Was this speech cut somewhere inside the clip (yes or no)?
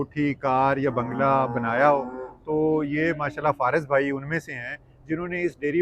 no